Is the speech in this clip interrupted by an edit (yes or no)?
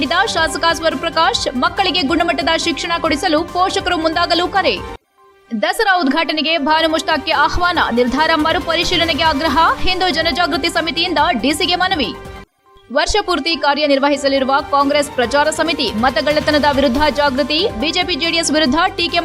no